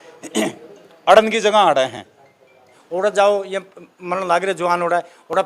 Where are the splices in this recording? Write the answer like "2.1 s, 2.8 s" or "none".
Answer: 2.7 s